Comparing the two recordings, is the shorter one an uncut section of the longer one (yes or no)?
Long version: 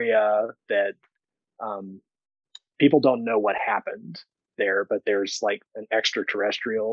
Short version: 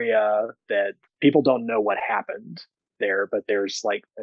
no